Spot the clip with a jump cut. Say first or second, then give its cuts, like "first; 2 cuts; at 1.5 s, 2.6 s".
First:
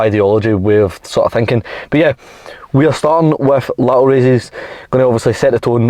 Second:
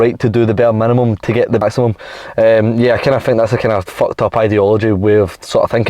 second; 1 cut; at 1.6 s